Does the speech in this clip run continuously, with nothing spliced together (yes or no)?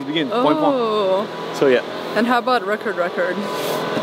yes